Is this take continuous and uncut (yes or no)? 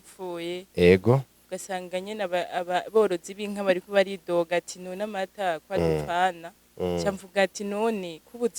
no